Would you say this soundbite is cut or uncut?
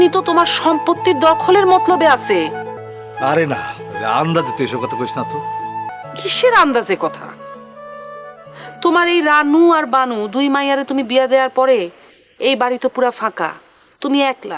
cut